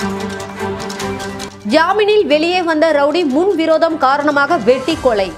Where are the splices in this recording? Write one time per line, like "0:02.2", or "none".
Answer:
none

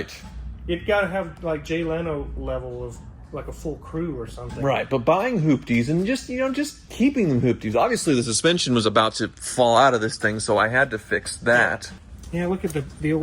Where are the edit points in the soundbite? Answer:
0:11.9

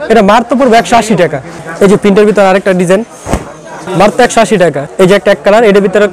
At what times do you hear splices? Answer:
0:01.5
0:04.8

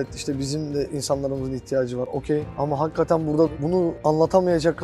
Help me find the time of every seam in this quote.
0:00.9
0:02.3
0:03.8

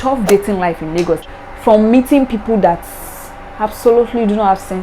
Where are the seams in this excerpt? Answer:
0:01.2

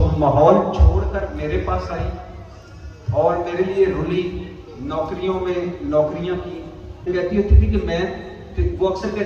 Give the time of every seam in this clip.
0:07.1

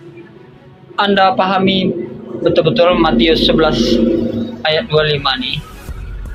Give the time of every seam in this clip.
none

